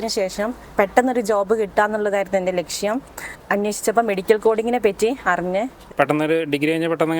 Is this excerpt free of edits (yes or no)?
no